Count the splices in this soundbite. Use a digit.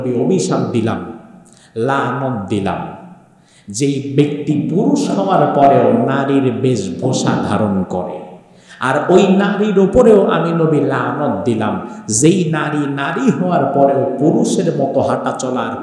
0